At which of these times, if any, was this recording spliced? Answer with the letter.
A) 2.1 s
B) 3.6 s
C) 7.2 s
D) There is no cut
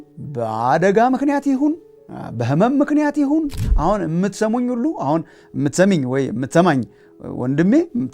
B